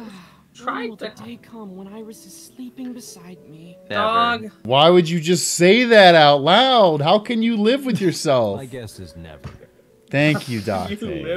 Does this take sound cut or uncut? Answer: cut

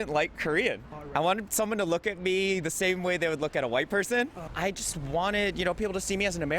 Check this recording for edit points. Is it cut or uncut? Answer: cut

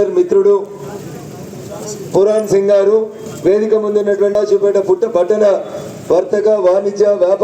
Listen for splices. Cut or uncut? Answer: cut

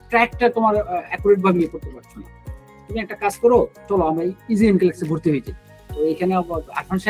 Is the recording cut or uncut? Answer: cut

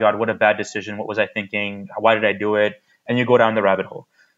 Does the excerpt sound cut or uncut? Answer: uncut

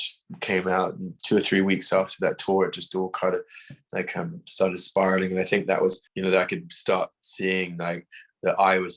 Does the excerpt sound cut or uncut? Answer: cut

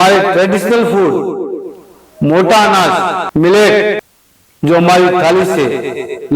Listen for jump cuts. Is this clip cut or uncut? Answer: cut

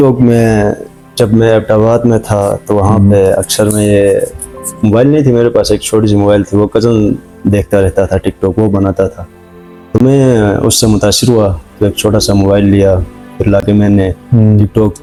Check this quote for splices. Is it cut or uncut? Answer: uncut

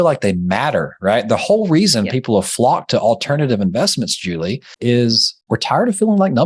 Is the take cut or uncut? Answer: cut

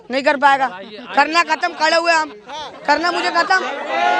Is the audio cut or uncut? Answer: uncut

